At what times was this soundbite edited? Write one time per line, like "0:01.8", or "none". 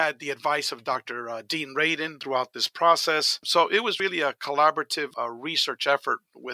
0:02.2
0:03.4
0:05.1